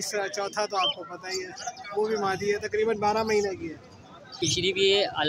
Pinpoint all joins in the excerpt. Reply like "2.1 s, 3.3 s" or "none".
4.4 s